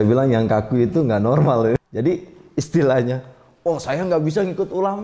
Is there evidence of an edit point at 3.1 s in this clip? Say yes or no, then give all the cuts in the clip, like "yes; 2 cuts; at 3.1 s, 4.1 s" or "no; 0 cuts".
no; 1 cut; at 1.8 s